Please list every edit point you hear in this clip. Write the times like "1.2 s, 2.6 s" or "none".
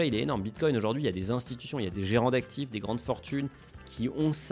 none